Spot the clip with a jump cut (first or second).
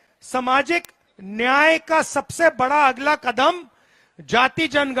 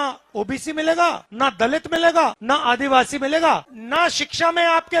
second